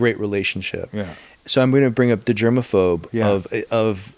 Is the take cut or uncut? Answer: cut